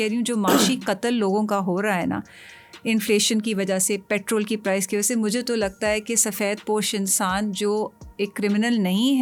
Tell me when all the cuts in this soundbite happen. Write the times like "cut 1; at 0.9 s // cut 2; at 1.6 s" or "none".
none